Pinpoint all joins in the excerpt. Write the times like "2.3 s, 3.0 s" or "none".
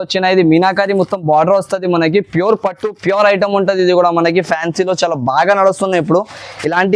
none